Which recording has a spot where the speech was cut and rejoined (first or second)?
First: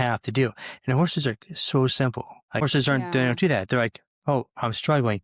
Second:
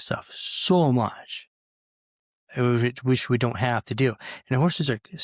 first